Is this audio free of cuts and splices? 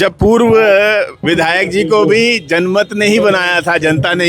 no; 1 cut; at 1.2 s

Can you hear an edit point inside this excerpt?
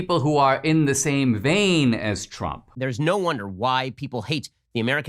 yes; 1 cut; at 2.7 s

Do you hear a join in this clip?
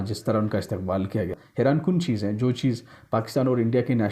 yes; 1 cut; at 1.4 s

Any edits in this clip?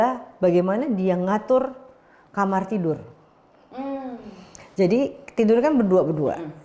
no; 0 cuts

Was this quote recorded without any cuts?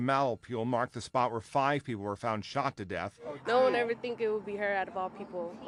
yes; 0 cuts

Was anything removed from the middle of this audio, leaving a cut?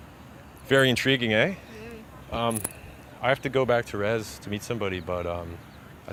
no; 0 cuts

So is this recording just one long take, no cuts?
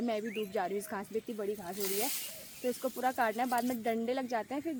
yes; 0 cuts

